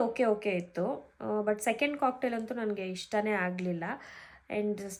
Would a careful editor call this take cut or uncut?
uncut